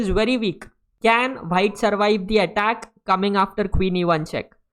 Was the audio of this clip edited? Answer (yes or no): no